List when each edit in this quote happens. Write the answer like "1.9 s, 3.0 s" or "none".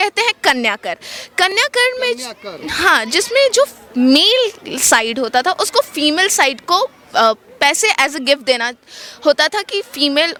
none

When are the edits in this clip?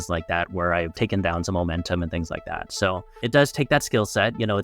3.2 s

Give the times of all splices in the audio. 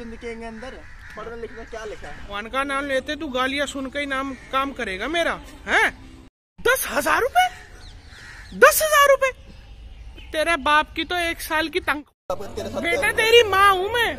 2.4 s, 6.1 s, 12.0 s

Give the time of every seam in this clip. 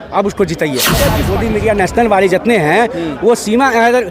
1.2 s

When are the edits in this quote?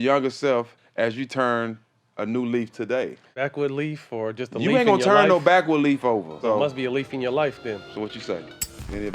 3.3 s, 6.3 s, 7.8 s

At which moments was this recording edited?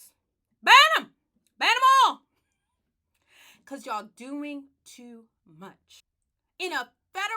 5.9 s

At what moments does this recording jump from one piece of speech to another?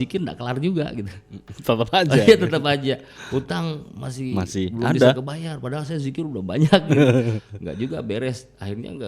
none

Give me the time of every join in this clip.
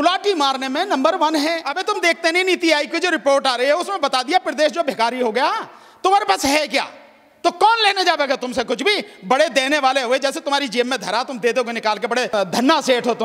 1.7 s, 12.3 s

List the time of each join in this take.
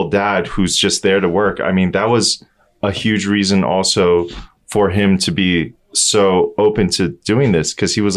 none

